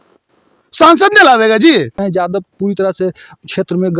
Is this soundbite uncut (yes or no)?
no